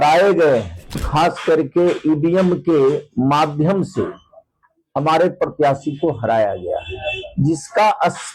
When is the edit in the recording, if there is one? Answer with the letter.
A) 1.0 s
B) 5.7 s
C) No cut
A